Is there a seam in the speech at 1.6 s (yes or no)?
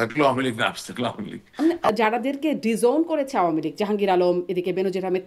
yes